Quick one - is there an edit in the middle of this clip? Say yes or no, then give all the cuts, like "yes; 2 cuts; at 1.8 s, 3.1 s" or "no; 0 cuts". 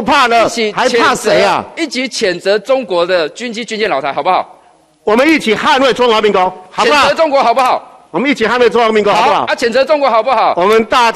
no; 0 cuts